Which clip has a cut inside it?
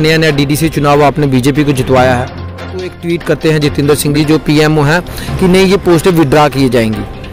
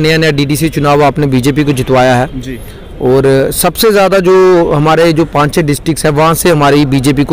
first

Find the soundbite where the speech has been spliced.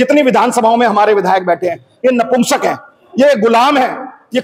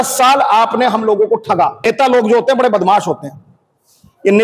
second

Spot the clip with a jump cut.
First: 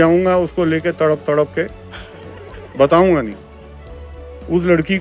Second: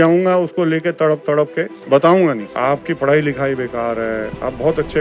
second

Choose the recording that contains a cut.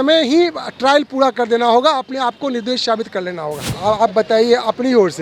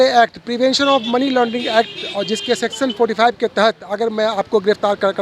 first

